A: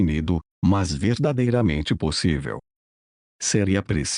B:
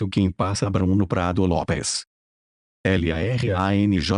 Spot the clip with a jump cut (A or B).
B